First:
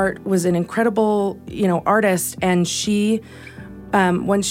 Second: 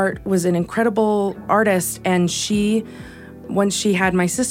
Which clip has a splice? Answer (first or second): second